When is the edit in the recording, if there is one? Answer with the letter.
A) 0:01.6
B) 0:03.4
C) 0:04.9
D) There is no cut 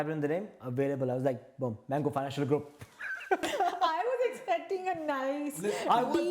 B